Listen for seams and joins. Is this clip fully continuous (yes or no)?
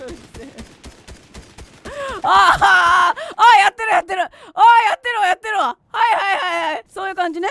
yes